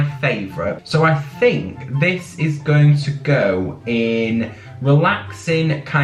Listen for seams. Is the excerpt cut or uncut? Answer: uncut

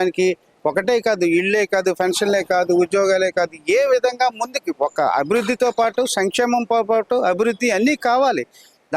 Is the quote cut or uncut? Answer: uncut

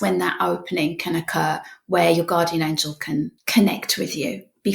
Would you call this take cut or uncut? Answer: cut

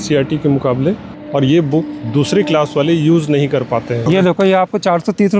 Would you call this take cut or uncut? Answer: cut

